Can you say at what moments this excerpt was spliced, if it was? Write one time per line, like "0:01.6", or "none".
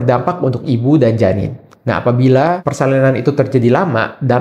none